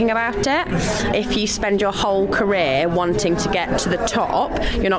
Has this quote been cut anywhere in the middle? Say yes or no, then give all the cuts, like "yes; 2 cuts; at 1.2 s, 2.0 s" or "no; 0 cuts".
yes; 1 cut; at 1.1 s